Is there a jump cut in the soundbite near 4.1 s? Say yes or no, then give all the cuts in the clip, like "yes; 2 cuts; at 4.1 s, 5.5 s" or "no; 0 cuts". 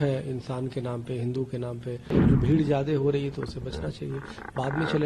no; 1 cut; at 2.1 s